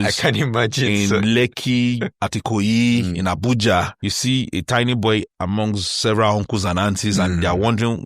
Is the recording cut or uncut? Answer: cut